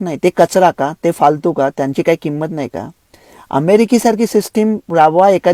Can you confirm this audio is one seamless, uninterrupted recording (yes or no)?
yes